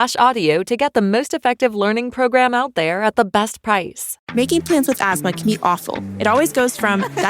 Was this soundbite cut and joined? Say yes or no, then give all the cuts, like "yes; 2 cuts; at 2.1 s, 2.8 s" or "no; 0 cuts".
yes; 1 cut; at 4.2 s